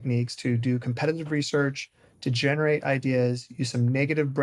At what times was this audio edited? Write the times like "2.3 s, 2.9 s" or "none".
none